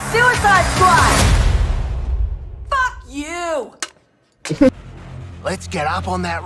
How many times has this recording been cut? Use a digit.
1